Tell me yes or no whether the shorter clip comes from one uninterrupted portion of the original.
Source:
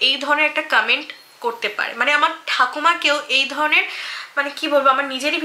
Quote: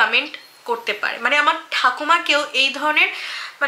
yes